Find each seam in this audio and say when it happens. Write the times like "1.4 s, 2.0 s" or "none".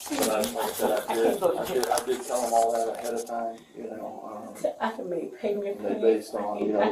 none